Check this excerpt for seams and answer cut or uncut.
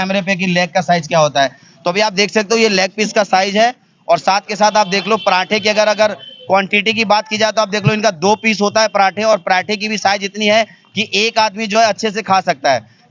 uncut